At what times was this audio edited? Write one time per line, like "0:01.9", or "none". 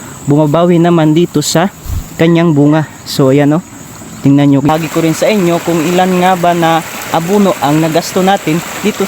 0:04.7